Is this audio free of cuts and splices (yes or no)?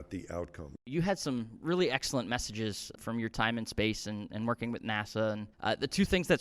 no